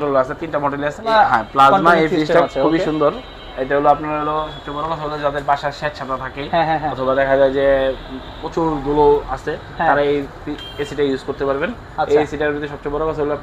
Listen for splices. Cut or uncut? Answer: cut